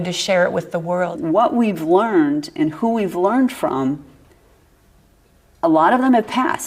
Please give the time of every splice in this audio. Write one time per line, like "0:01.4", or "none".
0:01.1